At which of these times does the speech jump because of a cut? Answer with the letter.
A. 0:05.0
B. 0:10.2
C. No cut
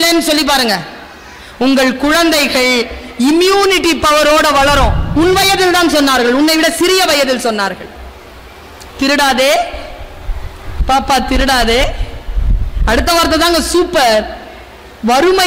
A